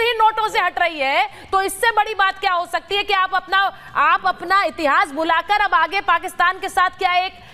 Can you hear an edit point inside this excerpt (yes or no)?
no